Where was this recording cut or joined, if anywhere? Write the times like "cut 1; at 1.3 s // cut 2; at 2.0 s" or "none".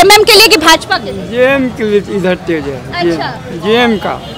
none